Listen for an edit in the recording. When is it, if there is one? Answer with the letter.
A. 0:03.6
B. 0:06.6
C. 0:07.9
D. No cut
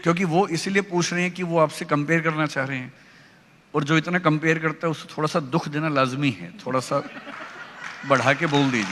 D